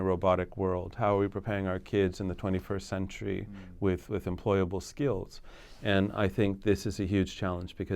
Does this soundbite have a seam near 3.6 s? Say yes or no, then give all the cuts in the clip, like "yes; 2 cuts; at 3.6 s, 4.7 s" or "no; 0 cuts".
no; 0 cuts